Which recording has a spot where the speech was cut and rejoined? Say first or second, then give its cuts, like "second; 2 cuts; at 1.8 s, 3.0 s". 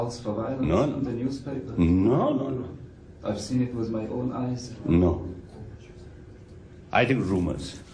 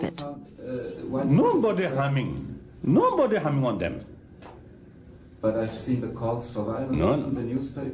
second; 2 cuts; at 2.7 s, 5.1 s